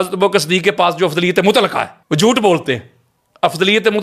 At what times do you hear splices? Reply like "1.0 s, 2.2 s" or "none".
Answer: 1.9 s